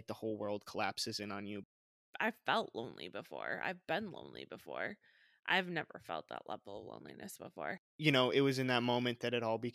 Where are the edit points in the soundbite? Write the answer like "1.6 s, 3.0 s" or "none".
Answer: 1.8 s, 7.9 s